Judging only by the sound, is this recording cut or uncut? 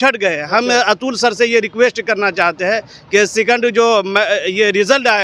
uncut